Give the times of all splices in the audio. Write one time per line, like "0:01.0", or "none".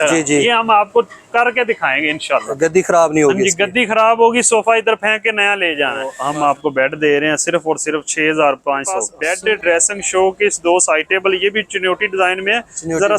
0:06.2
0:09.2